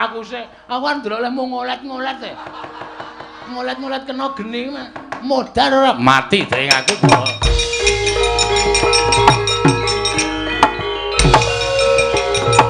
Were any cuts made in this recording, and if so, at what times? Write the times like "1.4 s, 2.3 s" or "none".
none

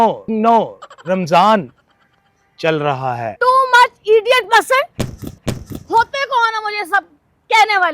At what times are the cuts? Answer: 3.3 s

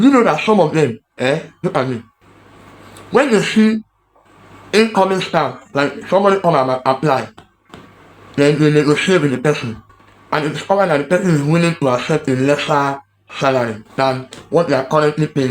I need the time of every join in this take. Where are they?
none

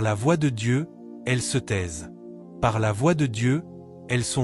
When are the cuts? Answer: 2.6 s

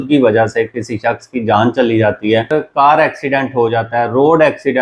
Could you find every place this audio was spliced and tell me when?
2.5 s

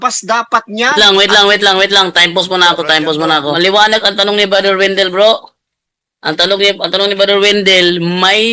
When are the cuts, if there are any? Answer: 3.5 s

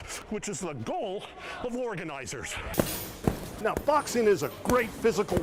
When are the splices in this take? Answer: 2.7 s

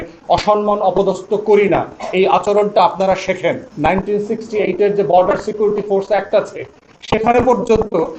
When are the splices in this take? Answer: 3.7 s

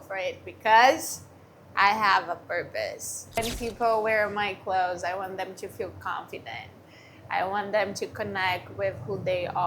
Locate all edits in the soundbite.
3.4 s

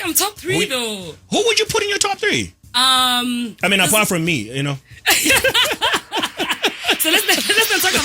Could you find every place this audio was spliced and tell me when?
none

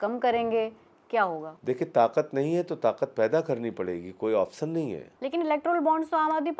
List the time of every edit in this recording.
1.5 s, 5.1 s

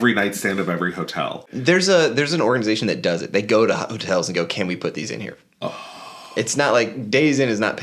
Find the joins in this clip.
1.5 s

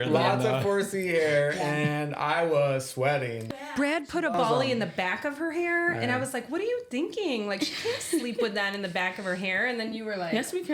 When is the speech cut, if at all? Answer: 3.6 s

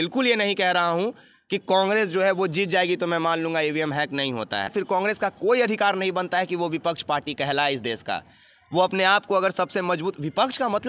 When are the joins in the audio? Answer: 4.7 s

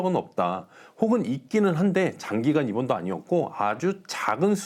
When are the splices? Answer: none

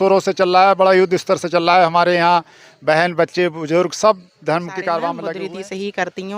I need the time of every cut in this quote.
5.2 s

